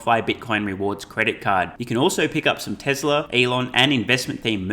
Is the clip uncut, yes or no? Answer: no